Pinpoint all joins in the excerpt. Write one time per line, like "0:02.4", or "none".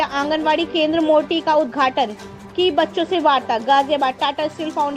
none